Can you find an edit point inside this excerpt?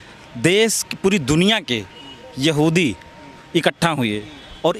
no; 0 cuts

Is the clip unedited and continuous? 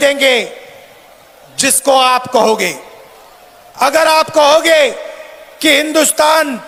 yes; 0 cuts

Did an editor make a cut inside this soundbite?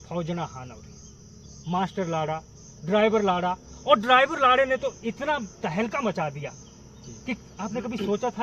no; 0 cuts

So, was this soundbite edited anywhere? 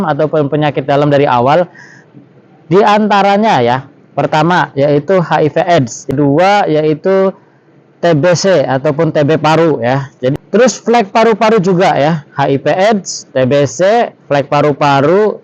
yes; 2 cuts; at 6.1 s, 10.3 s

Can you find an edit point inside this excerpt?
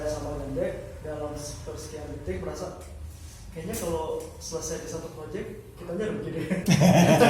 no; 0 cuts

